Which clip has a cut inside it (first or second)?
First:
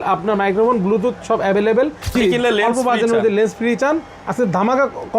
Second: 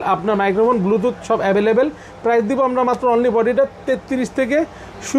first